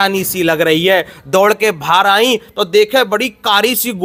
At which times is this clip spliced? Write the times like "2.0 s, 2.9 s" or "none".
none

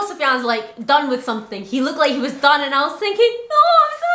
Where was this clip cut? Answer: none

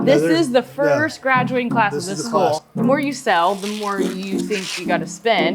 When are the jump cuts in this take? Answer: 2.7 s

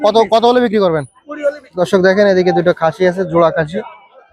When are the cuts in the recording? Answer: 1.8 s

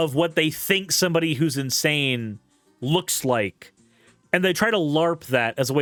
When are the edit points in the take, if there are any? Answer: none

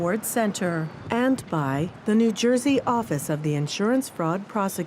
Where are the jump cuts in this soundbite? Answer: 1.9 s

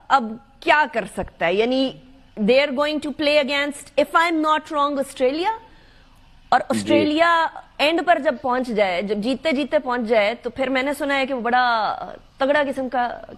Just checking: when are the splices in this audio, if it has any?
none

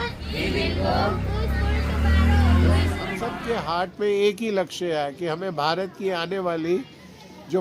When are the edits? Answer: 3.2 s

